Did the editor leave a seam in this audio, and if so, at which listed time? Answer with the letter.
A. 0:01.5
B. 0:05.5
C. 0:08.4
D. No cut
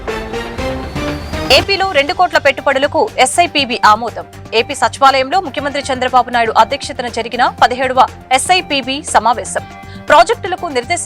A